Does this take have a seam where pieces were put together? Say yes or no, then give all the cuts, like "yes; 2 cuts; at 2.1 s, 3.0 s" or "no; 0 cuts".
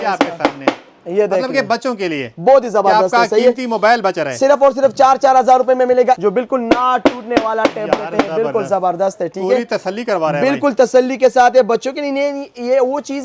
yes; 1 cut; at 6.2 s